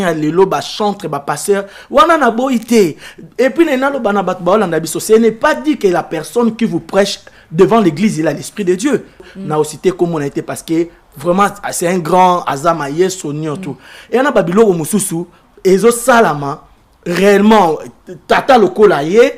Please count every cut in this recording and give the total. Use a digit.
1